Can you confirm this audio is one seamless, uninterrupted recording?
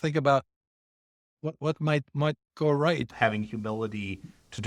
no; 1 cut; at 3.1 s

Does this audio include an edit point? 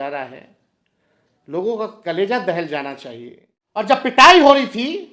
yes; 1 cut; at 3.6 s

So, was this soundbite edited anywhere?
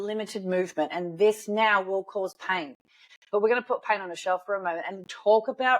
yes; 1 cut; at 3.0 s

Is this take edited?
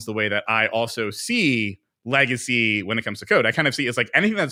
no; 0 cuts

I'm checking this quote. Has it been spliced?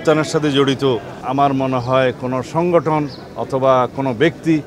no; 0 cuts

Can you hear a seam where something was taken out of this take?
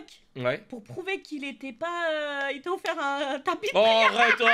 no; 0 cuts

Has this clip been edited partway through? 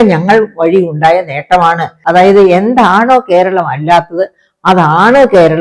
yes; 1 cut; at 1.9 s

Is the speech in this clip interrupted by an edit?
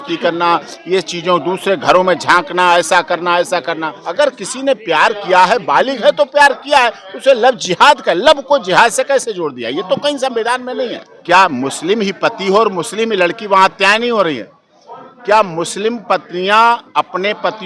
yes; 2 cuts; at 4.0 s, 11.1 s

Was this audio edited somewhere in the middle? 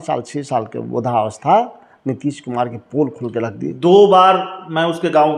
no; 0 cuts

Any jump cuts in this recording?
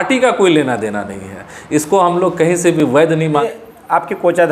yes; 1 cut; at 3.4 s

